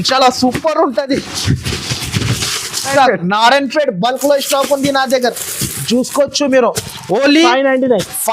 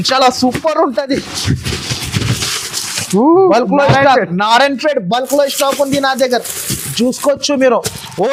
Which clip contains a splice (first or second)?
first